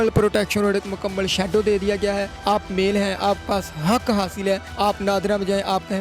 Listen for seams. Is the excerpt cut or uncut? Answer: cut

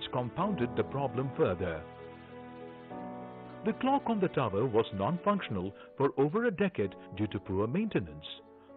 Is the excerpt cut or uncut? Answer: cut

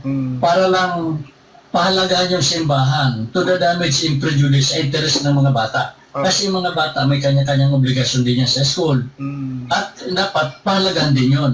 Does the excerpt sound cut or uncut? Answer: uncut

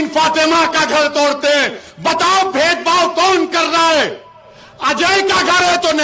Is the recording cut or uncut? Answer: uncut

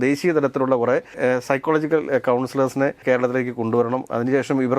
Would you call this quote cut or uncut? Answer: cut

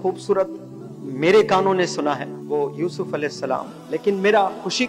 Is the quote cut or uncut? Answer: cut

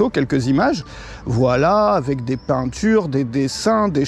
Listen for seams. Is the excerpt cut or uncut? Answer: uncut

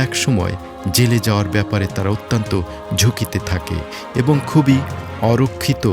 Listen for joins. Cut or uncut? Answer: uncut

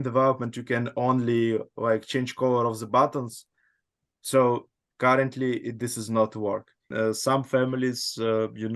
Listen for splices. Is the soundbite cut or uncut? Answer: cut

